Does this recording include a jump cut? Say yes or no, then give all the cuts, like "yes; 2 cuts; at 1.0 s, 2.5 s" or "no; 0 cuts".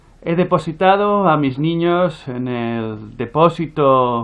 yes; 1 cut; at 1.4 s